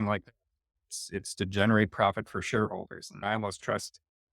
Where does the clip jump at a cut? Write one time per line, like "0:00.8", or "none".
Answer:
0:03.1